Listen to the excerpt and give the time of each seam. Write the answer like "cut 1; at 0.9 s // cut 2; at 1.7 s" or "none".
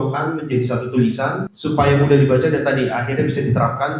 cut 1; at 1.5 s